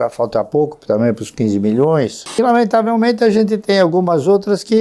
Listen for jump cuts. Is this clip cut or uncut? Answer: cut